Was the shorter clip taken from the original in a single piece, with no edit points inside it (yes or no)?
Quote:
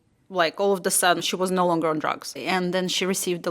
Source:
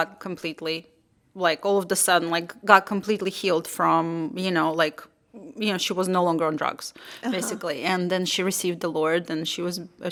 no